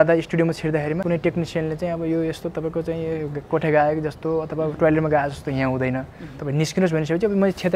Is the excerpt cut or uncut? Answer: cut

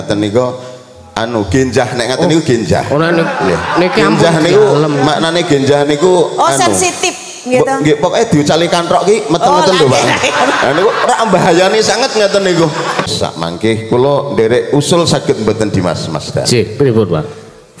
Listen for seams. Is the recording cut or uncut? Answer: cut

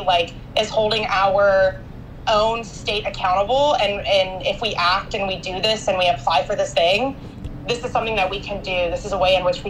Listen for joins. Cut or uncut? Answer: uncut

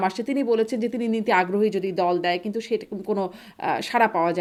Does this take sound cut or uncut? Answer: uncut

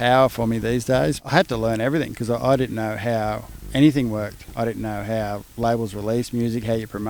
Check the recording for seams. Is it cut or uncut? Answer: cut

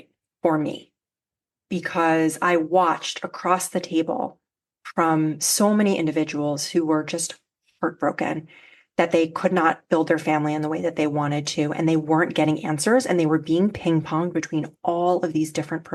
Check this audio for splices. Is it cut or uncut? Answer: uncut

